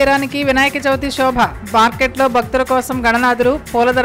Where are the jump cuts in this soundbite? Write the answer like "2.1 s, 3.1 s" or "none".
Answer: none